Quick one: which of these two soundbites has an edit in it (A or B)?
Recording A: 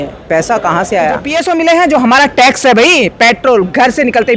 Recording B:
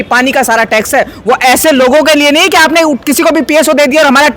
A